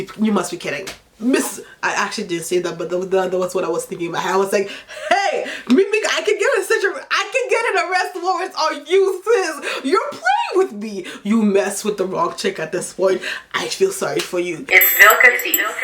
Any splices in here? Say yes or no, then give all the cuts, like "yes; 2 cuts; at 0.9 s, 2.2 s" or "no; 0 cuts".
yes; 1 cut; at 14.6 s